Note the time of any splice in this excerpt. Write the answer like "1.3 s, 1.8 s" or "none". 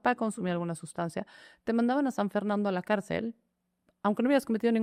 none